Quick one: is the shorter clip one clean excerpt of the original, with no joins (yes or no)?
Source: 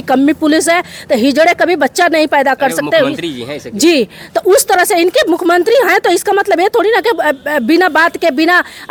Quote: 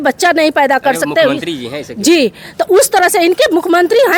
yes